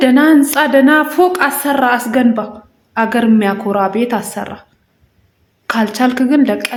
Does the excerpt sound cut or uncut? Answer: uncut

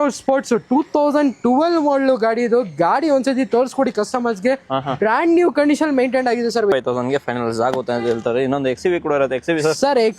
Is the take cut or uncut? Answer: cut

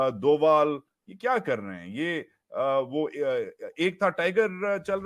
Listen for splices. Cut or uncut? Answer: uncut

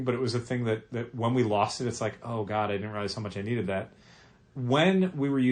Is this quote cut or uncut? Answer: uncut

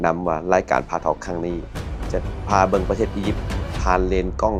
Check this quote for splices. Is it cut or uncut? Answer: uncut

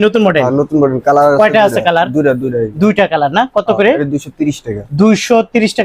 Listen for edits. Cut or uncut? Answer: uncut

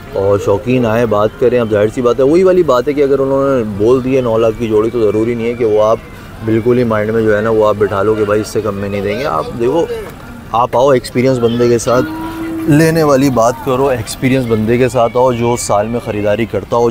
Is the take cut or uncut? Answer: uncut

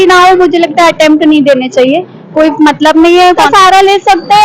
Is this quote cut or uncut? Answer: cut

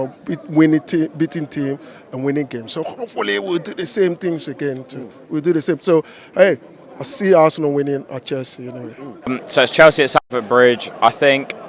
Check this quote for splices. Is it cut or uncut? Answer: cut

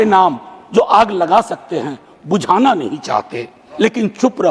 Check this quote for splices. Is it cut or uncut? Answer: cut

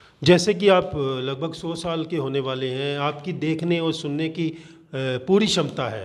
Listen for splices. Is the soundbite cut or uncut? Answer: uncut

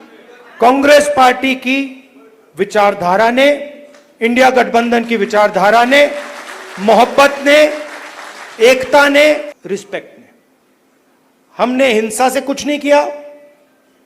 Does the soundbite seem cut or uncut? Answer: cut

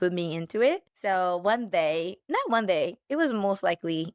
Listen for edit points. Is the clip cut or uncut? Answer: cut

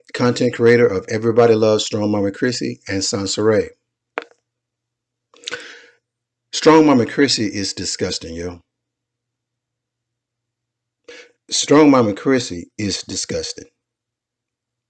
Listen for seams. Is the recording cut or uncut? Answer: cut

